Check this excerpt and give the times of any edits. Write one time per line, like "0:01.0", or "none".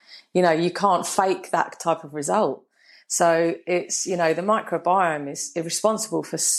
none